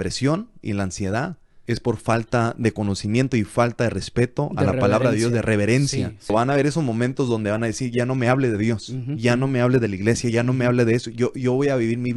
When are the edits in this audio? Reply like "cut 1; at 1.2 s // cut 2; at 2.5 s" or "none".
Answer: cut 1; at 1.5 s // cut 2; at 6.3 s